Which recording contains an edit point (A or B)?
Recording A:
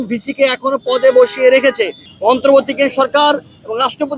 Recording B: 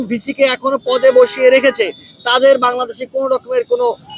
A